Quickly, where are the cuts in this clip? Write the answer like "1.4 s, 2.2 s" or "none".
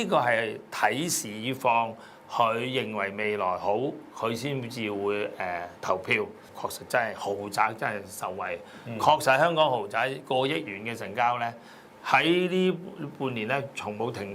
6.4 s

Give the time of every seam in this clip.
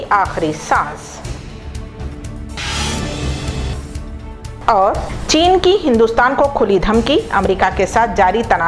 none

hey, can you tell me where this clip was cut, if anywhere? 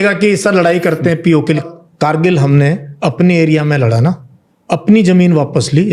1.7 s

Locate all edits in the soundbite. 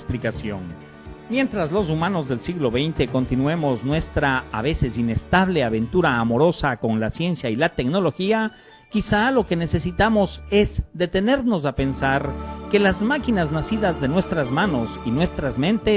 15.0 s

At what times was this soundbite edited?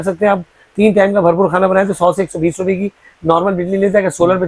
none

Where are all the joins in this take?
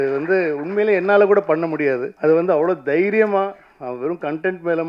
2.1 s

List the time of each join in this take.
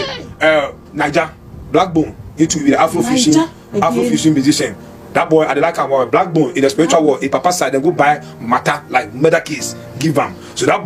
none

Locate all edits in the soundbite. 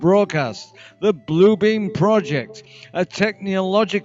3.1 s

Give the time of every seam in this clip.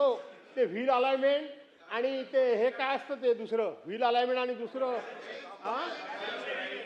none

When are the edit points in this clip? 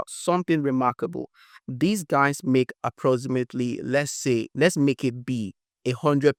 none

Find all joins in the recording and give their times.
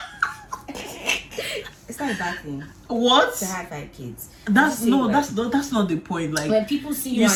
none

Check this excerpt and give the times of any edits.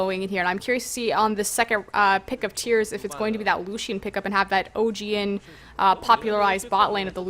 5.2 s

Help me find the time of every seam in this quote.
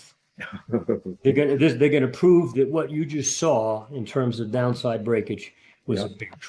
none

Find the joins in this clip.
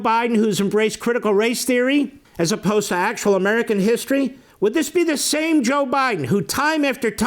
2.2 s, 4.4 s

